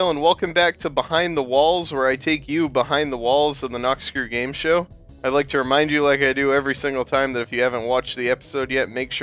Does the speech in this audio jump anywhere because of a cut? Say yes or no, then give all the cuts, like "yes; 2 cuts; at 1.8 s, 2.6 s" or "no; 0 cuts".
no; 0 cuts